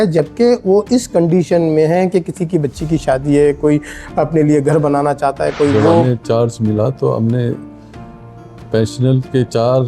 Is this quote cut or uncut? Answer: cut